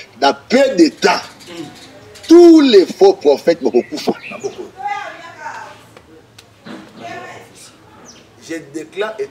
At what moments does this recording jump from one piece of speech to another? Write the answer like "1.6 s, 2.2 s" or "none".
none